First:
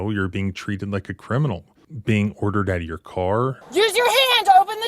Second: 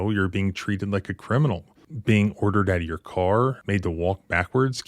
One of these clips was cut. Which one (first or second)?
first